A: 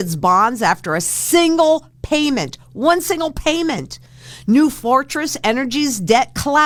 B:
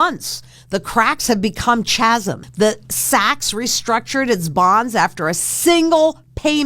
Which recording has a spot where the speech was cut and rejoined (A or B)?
B